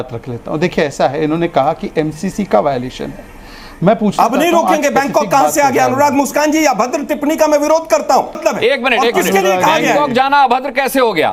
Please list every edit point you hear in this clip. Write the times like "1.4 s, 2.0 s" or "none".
8.4 s